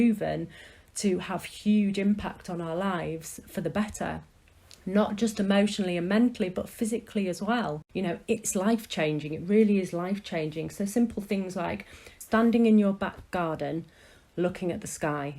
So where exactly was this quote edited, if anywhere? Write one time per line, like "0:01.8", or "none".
0:07.8
0:12.1